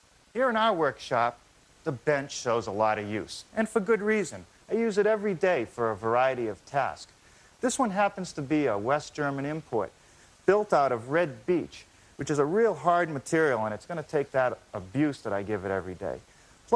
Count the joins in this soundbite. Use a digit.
1